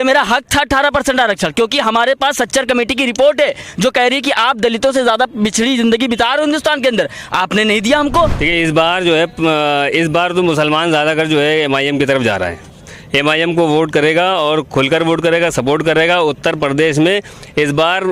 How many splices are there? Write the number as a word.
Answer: one